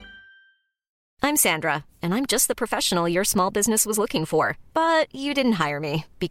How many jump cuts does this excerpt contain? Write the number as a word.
one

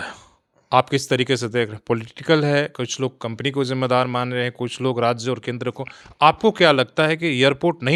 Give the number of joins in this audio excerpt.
zero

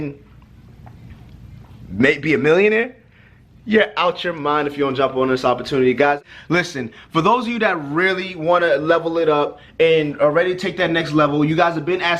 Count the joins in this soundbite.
one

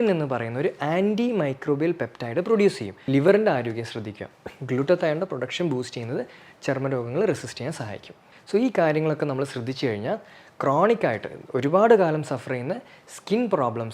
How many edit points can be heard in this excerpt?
one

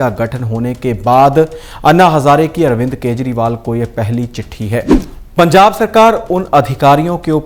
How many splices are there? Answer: one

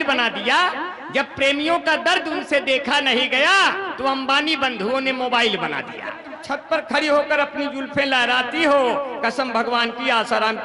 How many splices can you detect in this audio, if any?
one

